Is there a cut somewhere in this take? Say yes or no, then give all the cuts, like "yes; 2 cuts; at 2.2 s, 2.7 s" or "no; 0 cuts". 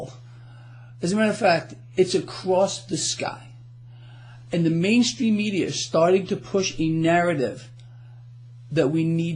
yes; 1 cut; at 6.3 s